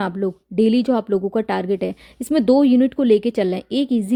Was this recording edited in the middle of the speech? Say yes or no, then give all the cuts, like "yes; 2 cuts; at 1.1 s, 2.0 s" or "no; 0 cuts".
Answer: no; 0 cuts